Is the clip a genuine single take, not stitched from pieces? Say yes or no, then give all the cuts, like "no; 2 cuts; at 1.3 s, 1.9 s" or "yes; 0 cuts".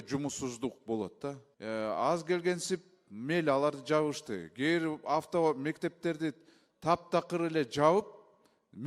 no; 1 cut; at 1.5 s